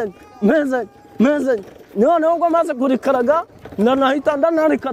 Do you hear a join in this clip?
no; 0 cuts

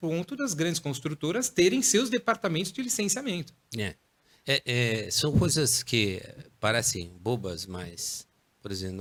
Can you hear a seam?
no; 0 cuts

